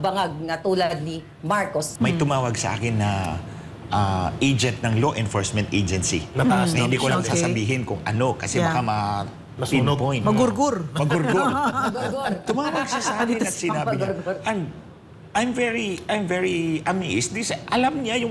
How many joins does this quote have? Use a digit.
1